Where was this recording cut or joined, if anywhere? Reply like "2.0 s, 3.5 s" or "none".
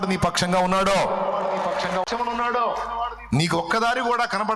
2.1 s